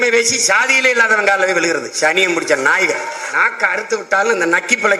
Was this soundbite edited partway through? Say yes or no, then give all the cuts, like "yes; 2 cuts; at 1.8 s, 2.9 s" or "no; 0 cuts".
yes; 1 cut; at 3.3 s